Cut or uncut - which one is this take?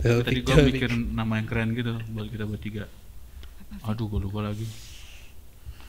uncut